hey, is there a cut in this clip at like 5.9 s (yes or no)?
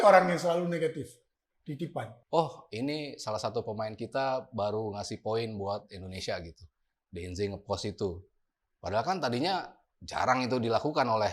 no